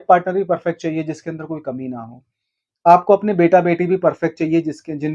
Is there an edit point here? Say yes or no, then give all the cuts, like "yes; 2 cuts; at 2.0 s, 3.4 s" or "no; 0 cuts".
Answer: no; 0 cuts